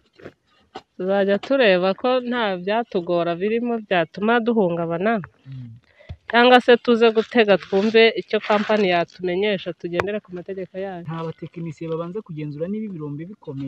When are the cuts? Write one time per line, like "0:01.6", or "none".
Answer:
0:11.0